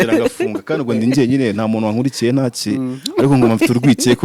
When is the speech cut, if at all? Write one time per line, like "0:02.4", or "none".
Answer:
none